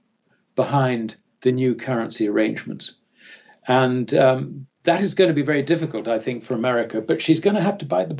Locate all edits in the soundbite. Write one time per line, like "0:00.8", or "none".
none